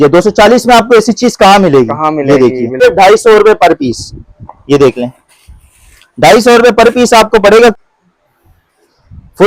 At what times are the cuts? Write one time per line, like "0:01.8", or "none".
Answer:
0:02.8
0:07.7